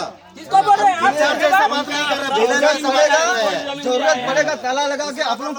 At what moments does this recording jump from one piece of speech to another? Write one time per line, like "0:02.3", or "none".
none